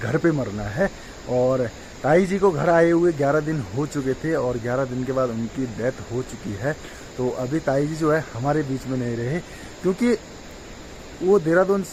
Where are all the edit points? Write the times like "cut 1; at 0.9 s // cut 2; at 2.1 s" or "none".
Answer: none

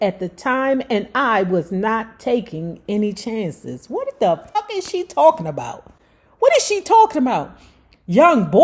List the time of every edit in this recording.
cut 1; at 4.6 s

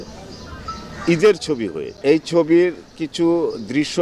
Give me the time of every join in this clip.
cut 1; at 1.9 s

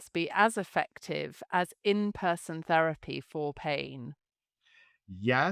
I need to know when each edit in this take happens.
none

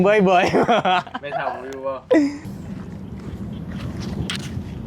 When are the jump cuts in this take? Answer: cut 1; at 2.4 s

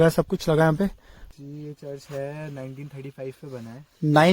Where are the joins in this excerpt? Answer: cut 1; at 1.5 s

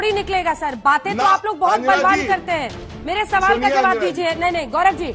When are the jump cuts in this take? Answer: none

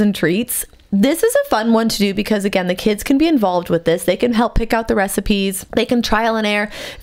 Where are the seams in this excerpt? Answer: cut 1; at 5.6 s

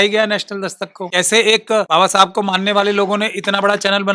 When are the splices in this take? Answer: cut 1; at 1.0 s // cut 2; at 1.9 s

